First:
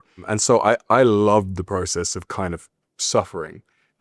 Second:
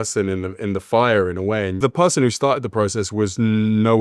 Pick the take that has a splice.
second; 1 cut; at 1.8 s

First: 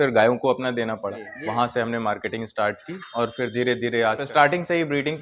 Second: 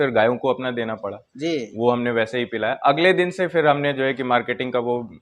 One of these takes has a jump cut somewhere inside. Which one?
first; 2 cuts; at 1.3 s, 4.2 s

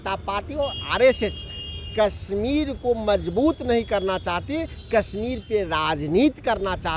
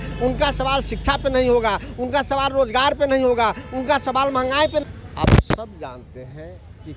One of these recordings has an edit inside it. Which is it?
second; 1 cut; at 4.8 s

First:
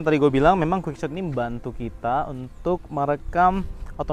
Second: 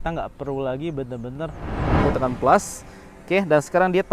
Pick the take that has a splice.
second; 1 cut; at 2.0 s

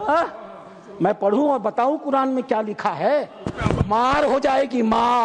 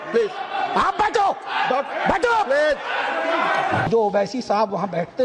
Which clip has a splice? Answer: second; 1 cut; at 3.9 s

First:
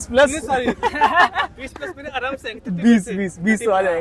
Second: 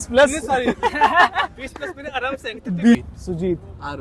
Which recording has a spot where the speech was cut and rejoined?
second; 1 cut; at 2.9 s

